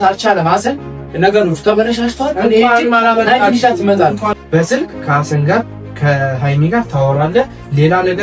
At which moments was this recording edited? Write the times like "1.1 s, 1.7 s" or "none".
4.3 s